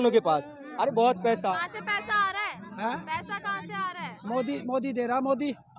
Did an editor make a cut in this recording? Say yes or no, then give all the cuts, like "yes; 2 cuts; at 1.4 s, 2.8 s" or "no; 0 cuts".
yes; 1 cut; at 1.5 s